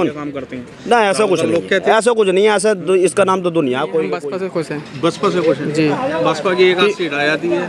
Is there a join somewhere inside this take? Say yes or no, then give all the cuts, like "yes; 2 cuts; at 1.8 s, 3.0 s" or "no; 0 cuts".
yes; 1 cut; at 4.2 s